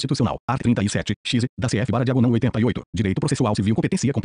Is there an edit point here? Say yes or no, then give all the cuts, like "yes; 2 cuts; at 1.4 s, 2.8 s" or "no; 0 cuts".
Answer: yes; 1 cut; at 3.2 s